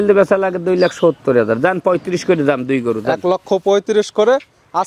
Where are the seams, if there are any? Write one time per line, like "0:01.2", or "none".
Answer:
none